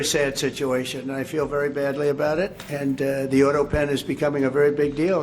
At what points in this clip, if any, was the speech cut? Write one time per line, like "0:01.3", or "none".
0:02.6